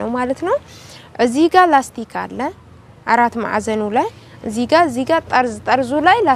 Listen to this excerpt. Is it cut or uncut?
uncut